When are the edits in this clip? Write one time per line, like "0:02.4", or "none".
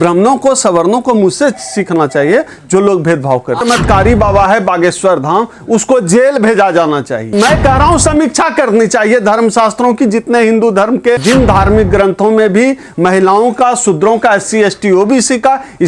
0:03.6
0:07.3
0:11.2